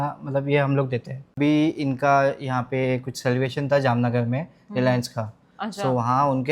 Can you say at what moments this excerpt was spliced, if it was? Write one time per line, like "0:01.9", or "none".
0:01.4